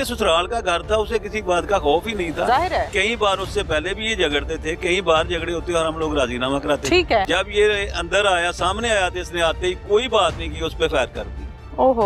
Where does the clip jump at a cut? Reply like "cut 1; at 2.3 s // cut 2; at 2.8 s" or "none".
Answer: cut 1; at 7.3 s